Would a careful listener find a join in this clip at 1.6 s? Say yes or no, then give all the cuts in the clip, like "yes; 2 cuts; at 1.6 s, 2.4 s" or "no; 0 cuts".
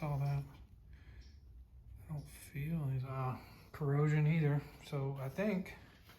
no; 1 cut; at 3.1 s